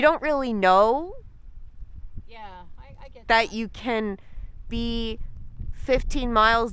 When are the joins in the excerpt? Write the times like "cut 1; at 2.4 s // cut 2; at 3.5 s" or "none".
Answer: none